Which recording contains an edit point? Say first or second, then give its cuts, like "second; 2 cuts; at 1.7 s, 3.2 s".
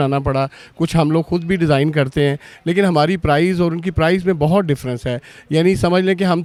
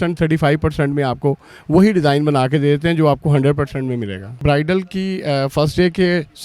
second; 1 cut; at 4.4 s